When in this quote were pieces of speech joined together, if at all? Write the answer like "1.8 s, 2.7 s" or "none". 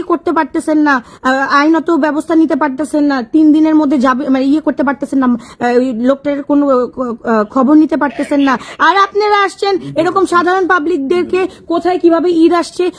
none